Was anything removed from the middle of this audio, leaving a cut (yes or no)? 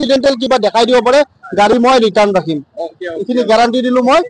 no